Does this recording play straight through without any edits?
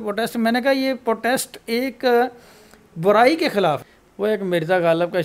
no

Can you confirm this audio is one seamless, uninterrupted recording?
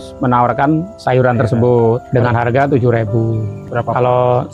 no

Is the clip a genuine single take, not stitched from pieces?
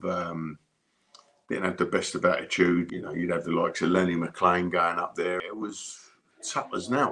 no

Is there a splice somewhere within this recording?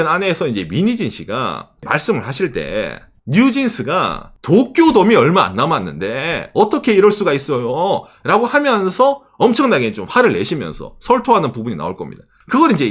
no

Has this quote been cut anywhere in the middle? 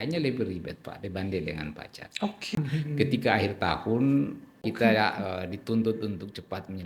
yes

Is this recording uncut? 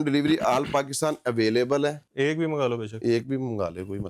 no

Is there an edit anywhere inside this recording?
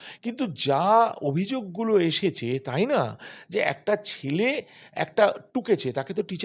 no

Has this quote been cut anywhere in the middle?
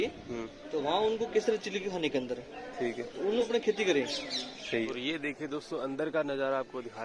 yes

